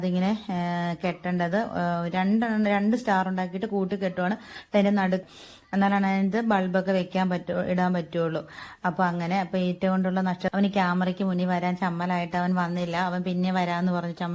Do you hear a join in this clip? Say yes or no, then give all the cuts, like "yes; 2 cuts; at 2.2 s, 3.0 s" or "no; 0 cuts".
yes; 2 cuts; at 5.2 s, 10.5 s